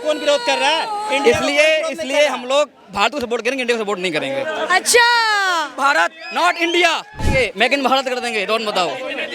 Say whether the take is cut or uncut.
cut